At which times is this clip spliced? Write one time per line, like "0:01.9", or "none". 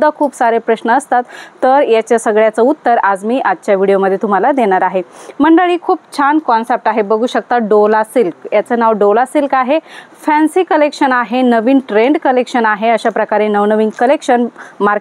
none